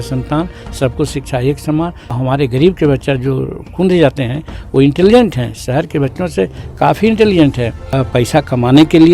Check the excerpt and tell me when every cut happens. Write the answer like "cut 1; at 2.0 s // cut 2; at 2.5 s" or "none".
cut 1; at 2.0 s // cut 2; at 8.0 s